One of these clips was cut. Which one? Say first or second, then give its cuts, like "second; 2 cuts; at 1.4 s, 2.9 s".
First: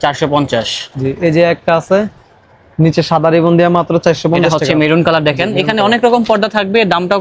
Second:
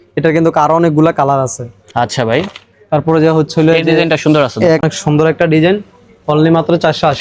second; 1 cut; at 4.8 s